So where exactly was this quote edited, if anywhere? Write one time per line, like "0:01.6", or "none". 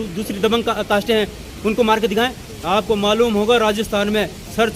none